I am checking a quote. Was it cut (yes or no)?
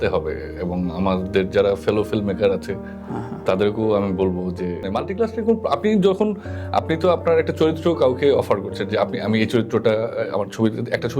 yes